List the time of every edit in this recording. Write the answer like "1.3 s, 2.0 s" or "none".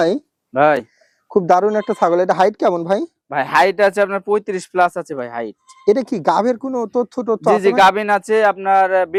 none